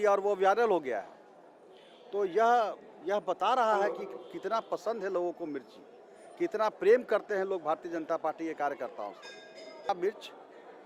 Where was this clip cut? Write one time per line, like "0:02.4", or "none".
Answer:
0:09.9